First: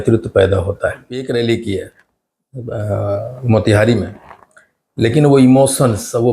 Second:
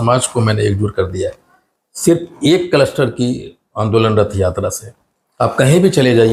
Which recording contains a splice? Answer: first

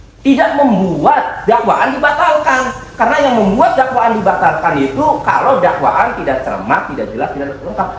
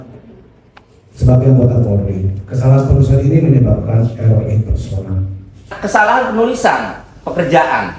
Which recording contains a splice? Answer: second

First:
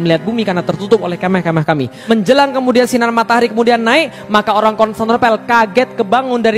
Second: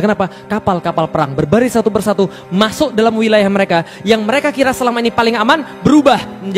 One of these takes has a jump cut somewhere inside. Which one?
first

